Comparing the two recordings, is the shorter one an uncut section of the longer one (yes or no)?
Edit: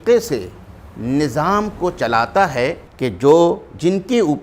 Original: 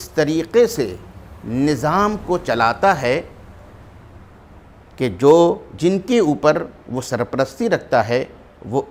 no